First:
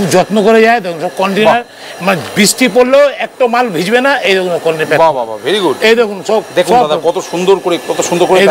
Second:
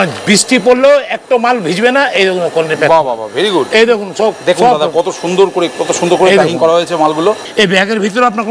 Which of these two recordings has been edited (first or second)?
second